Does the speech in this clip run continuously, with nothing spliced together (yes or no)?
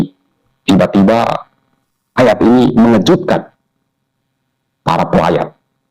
yes